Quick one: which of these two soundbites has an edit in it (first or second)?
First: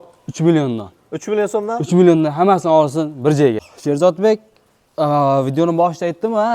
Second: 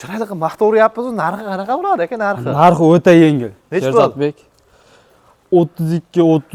first